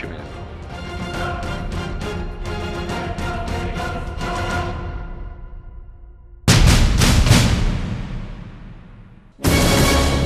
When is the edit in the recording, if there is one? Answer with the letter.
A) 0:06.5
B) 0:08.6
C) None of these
A